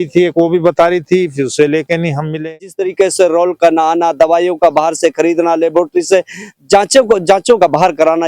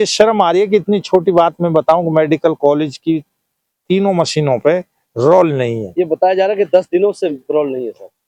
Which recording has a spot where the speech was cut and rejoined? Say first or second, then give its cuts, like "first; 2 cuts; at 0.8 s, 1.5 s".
first; 1 cut; at 2.8 s